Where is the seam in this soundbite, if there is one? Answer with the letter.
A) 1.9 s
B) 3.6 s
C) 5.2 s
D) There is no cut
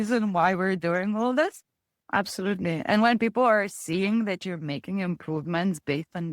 A